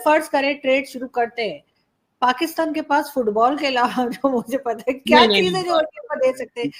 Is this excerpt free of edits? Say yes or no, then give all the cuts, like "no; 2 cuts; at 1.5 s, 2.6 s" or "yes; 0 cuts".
yes; 0 cuts